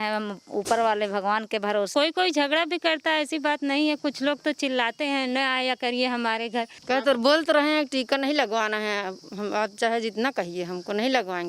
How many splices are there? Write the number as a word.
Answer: two